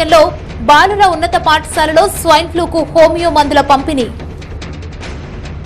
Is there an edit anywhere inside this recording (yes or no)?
yes